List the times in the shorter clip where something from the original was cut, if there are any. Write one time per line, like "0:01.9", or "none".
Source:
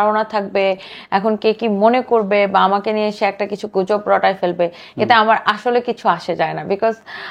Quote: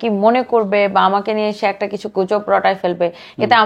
none